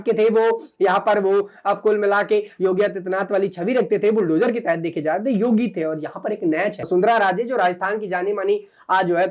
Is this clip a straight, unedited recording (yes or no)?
no